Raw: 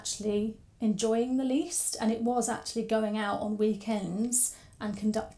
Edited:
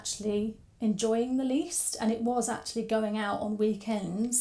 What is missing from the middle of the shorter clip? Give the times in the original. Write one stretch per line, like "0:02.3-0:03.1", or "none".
none